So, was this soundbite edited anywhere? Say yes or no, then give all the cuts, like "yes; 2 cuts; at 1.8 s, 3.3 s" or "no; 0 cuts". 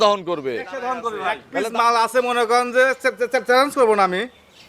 yes; 1 cut; at 1.4 s